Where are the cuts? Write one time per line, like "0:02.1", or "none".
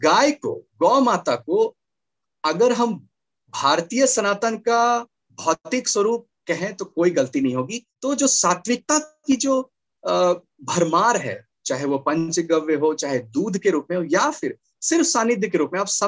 0:07.9